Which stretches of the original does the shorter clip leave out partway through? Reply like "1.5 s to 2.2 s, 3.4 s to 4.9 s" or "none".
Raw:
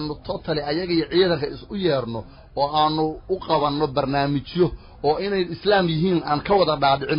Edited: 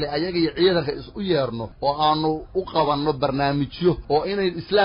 2.2 s to 2.4 s, 4.8 s to 4.9 s